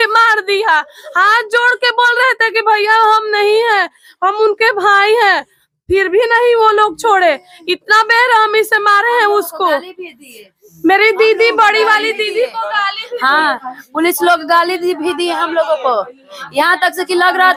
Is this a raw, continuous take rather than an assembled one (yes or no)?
yes